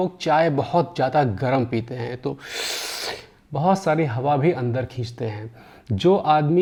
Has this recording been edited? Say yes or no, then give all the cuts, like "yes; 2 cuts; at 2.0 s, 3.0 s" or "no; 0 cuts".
no; 0 cuts